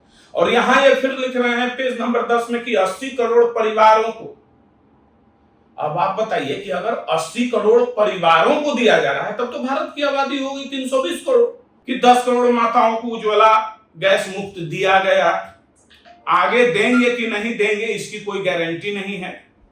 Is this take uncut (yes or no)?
no